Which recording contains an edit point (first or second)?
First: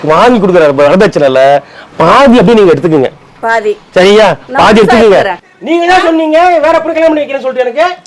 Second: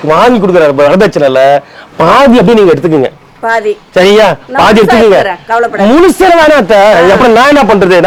first